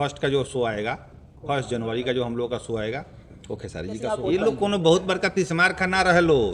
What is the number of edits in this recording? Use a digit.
1